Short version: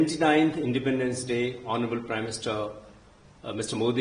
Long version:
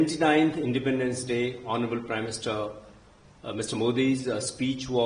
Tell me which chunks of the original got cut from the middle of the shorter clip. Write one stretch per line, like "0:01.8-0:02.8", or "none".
none